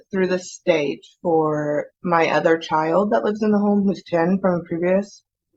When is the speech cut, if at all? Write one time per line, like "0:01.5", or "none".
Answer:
none